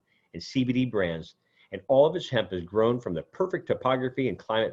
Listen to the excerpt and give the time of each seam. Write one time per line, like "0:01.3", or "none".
none